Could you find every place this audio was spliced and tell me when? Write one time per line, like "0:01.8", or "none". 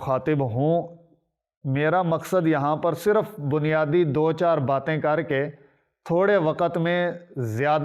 none